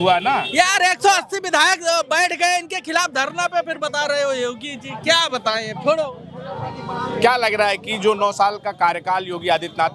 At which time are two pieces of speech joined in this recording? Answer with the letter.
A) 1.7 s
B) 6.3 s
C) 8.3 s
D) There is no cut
D